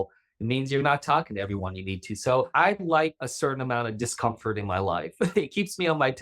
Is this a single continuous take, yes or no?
no